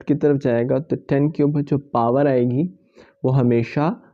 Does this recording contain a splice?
no; 0 cuts

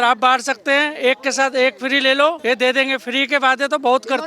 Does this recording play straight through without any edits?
no; 1 cut; at 2.4 s

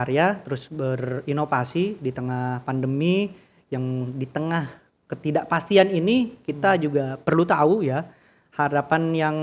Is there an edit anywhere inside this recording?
no; 0 cuts

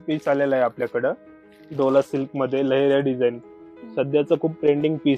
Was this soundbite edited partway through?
no; 0 cuts

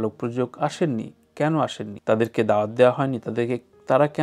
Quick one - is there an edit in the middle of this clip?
yes; 1 cut; at 1.9 s

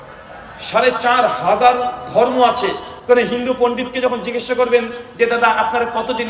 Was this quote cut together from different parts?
yes; 1 cut; at 2.9 s

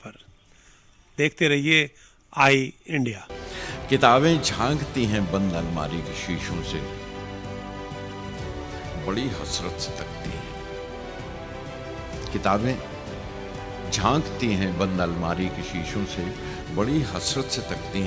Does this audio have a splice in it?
yes; 1 cut; at 3.2 s

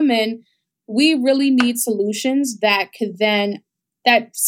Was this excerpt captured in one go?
yes; 0 cuts

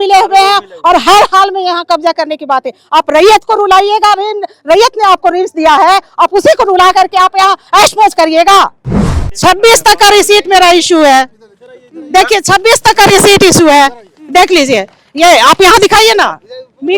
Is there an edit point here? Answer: yes; 1 cut; at 9.1 s

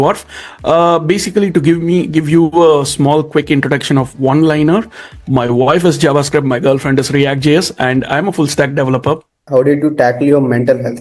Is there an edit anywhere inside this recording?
yes; 1 cut; at 9.4 s

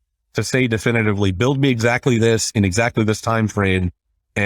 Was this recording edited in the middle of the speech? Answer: no; 0 cuts

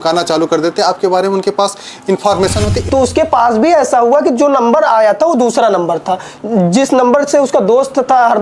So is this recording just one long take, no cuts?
no; 1 cut; at 2.8 s

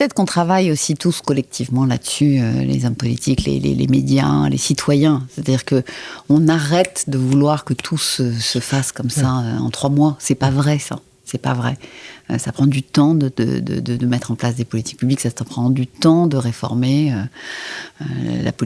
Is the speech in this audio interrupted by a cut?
no; 0 cuts

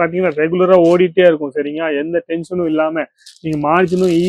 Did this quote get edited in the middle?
no; 0 cuts

